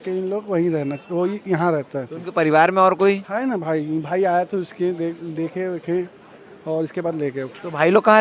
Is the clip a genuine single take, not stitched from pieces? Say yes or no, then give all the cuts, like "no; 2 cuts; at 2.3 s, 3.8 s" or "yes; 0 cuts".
yes; 0 cuts